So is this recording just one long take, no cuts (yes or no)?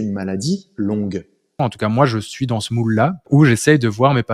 no